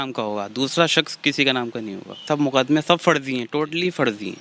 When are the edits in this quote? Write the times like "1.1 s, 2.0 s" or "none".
2.2 s